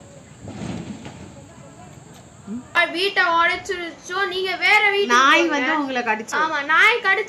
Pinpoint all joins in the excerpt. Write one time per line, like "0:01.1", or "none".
0:02.8
0:06.3